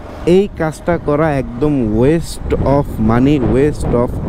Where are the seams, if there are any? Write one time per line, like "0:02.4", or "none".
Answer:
none